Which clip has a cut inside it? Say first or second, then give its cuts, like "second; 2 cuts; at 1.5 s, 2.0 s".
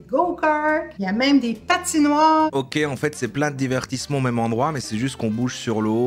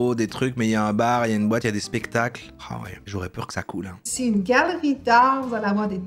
first; 2 cuts; at 0.9 s, 2.5 s